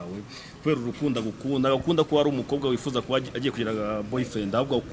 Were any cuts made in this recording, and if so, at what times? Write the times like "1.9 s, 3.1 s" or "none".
none